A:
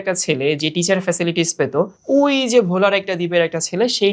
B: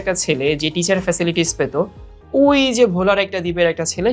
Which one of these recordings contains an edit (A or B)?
A